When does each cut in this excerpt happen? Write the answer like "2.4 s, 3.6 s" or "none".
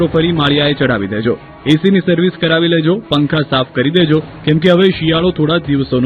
none